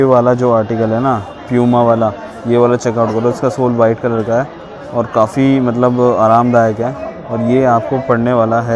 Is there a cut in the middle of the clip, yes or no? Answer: no